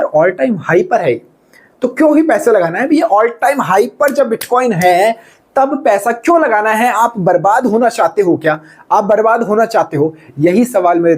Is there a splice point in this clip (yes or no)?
no